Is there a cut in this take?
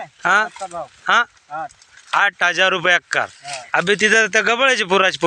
no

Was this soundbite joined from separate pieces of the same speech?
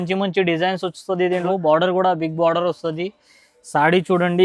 yes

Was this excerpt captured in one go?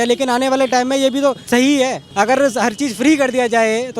no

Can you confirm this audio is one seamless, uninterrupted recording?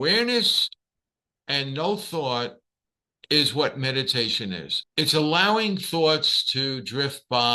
no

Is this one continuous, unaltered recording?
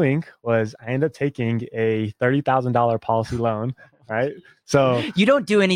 yes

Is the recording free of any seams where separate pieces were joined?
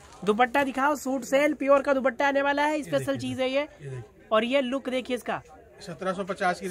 yes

